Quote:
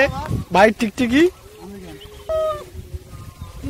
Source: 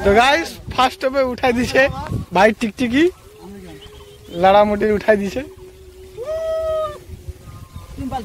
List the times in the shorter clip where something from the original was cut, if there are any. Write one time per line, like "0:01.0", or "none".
0:02.3